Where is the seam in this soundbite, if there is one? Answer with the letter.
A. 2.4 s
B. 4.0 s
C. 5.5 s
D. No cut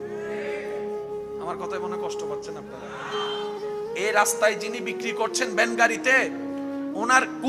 B